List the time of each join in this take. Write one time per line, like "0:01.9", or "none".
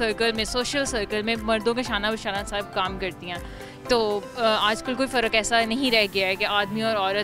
none